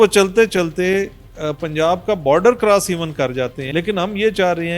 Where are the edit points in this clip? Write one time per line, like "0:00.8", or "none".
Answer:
0:03.6